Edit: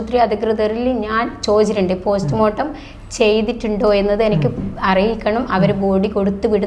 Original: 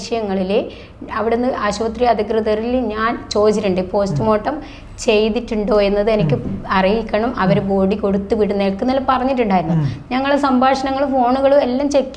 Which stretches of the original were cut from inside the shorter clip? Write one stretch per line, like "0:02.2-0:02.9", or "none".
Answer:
none